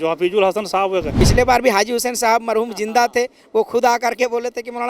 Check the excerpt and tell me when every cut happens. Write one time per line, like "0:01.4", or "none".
0:01.2